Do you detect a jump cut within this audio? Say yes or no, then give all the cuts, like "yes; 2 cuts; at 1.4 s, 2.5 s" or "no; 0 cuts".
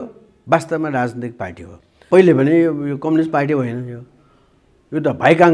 yes; 1 cut; at 2.0 s